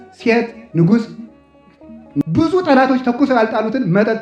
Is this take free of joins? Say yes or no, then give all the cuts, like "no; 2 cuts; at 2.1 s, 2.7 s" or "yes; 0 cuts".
no; 1 cut; at 1.6 s